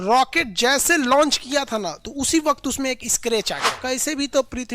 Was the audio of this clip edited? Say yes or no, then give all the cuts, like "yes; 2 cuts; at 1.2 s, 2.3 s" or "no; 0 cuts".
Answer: yes; 1 cut; at 3.7 s